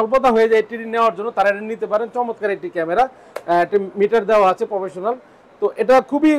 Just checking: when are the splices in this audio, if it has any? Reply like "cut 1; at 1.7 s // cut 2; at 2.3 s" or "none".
none